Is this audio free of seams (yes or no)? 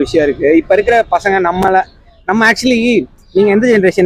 yes